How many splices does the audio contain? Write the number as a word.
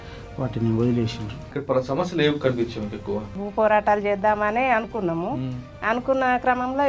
two